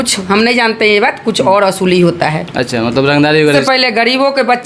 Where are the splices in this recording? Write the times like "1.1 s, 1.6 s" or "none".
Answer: 3.6 s